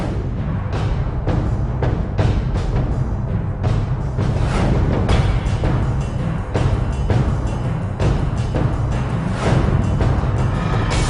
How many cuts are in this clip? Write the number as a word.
one